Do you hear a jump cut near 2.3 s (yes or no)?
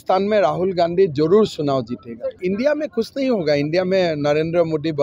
yes